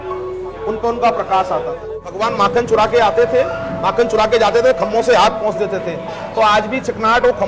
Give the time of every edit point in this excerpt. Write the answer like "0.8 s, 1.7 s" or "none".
2.2 s